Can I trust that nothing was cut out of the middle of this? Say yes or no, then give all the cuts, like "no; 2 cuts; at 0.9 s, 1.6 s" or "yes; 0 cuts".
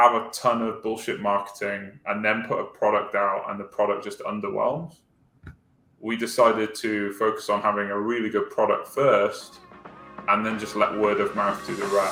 yes; 0 cuts